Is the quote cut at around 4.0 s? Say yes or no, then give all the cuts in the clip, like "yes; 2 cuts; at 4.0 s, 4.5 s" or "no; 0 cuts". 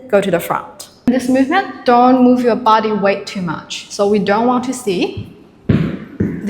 no; 1 cut; at 1.1 s